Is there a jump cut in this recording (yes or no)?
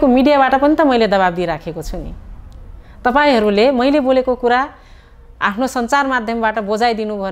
no